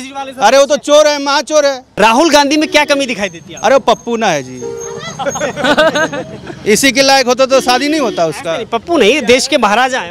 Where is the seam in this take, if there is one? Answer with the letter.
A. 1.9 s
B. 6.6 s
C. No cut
A